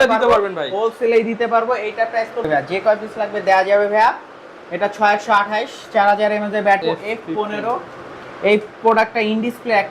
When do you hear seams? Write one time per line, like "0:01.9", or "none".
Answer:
0:02.5
0:06.8